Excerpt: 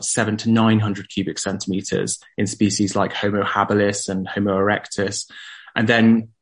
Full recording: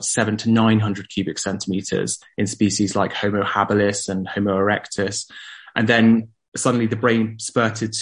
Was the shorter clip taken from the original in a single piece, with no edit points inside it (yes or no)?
yes